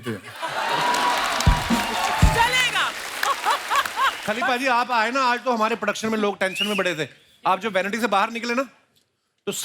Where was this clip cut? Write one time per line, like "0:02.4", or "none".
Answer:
0:04.2